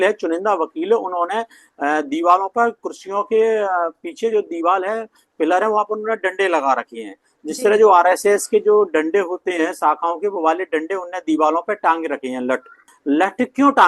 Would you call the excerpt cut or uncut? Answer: cut